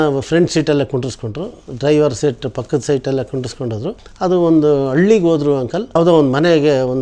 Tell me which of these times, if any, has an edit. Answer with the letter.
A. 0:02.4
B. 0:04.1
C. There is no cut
B